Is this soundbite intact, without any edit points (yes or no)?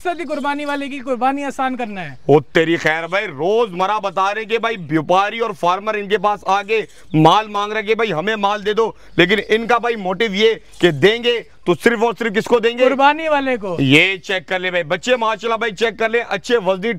yes